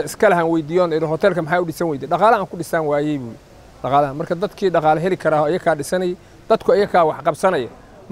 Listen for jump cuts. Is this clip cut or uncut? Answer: uncut